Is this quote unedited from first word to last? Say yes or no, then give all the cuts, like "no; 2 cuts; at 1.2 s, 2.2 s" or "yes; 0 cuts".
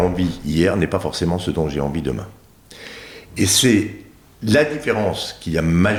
yes; 0 cuts